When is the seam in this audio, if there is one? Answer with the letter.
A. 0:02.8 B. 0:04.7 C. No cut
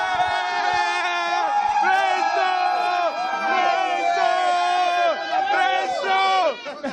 B